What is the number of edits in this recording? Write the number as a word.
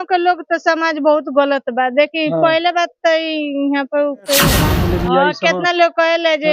one